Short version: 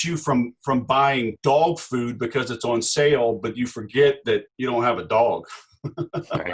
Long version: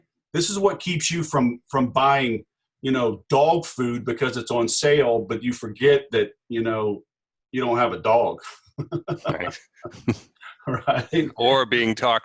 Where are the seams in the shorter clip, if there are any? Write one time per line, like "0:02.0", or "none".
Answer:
0:01.4
0:04.5

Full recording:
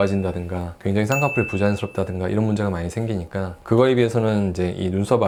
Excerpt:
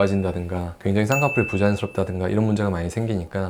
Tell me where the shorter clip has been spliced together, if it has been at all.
none

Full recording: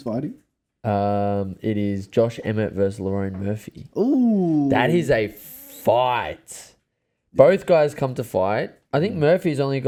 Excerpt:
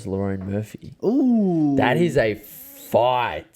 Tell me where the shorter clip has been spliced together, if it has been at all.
none

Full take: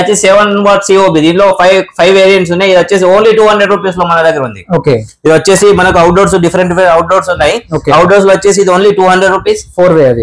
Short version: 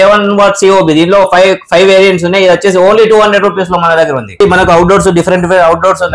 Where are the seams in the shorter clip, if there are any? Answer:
0:04.4

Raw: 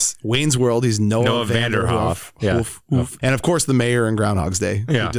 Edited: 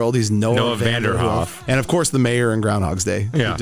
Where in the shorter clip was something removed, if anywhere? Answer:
0:01.6

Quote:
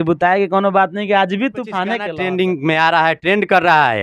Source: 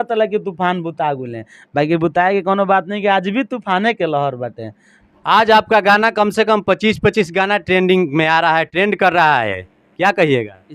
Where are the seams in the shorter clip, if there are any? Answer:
0:02.1

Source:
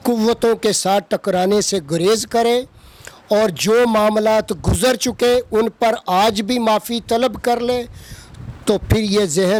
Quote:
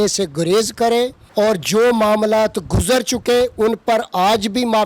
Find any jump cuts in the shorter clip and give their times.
0:01.2

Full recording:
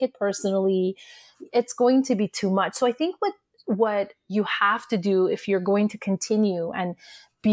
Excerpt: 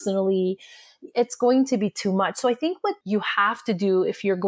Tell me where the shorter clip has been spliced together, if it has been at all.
0:03.0

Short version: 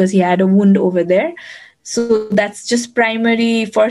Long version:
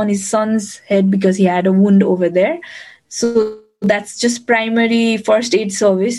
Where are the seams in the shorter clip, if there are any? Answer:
0:02.3

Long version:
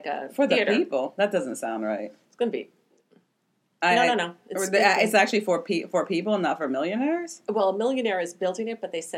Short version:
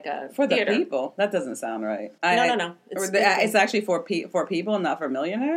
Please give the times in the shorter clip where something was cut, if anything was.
0:02.1

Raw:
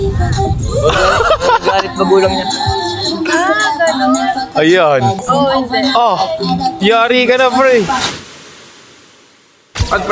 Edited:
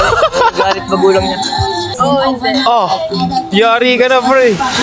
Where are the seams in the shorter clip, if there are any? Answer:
0:01.9

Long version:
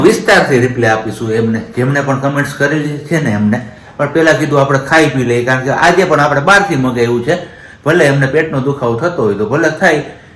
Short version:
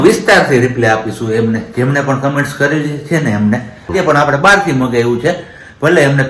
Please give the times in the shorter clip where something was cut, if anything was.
0:03.9

